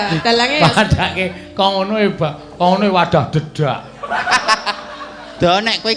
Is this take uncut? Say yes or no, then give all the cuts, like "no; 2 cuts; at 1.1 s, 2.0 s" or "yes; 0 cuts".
yes; 0 cuts